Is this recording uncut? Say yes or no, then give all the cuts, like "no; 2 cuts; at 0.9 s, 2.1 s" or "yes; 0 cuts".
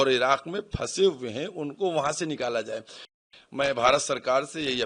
no; 1 cut; at 3.3 s